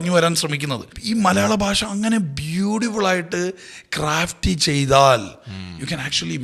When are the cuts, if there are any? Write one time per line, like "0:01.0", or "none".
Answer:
0:00.9